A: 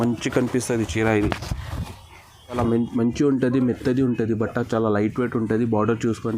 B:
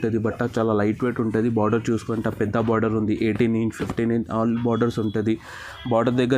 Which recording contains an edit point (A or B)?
A